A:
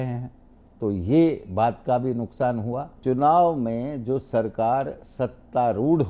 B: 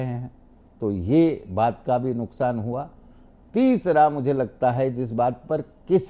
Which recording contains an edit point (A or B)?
A